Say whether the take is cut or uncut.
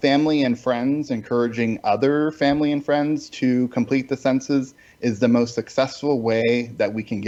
uncut